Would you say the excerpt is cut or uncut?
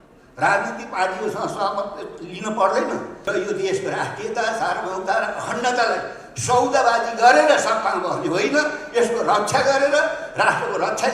cut